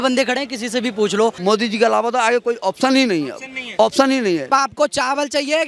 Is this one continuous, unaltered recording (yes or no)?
no